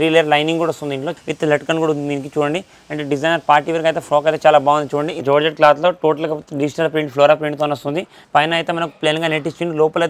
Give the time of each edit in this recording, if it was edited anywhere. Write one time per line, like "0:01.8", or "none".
0:01.1
0:05.1
0:08.2